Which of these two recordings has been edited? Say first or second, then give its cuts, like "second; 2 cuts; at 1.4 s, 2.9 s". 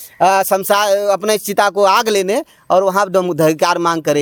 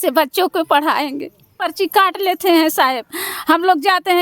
second; 1 cut; at 1.5 s